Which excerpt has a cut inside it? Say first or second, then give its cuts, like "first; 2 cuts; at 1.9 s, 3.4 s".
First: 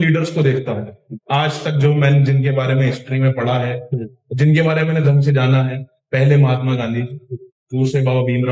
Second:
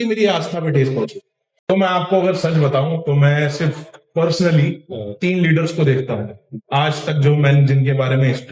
second; 1 cut; at 1.7 s